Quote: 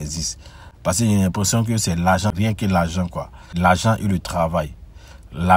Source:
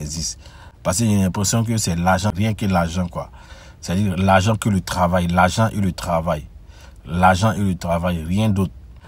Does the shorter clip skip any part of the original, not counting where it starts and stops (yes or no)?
yes